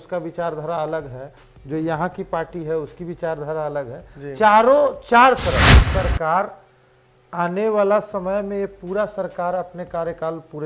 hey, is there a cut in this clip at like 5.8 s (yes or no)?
yes